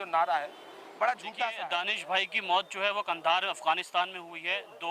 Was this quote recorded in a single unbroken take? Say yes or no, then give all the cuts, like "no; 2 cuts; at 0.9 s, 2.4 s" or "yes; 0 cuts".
no; 1 cut; at 1.6 s